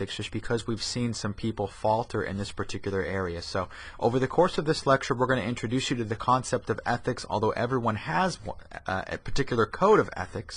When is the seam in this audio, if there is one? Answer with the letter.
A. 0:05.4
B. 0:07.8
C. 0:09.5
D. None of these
A